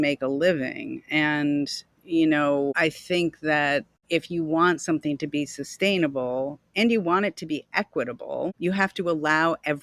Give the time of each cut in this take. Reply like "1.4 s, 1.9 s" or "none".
2.7 s, 3.9 s, 8.6 s